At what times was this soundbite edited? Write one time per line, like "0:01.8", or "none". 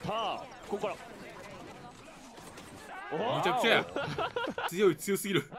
none